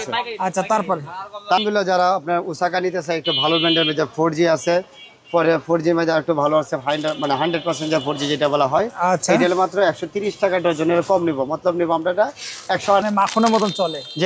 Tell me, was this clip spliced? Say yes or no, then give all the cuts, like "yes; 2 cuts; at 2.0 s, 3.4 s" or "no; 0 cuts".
yes; 1 cut; at 13.0 s